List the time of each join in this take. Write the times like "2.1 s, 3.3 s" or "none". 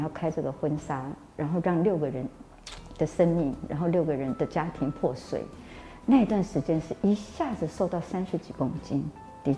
none